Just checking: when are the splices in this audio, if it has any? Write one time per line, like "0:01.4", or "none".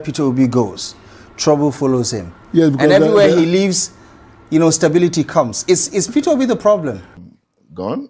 0:07.1